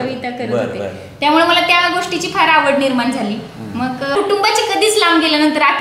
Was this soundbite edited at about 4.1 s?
yes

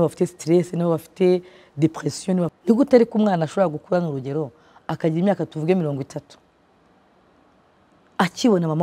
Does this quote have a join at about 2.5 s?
yes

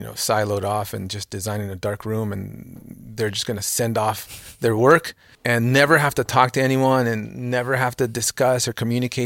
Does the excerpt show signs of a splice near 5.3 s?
yes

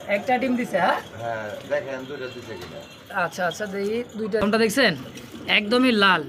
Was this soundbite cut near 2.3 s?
no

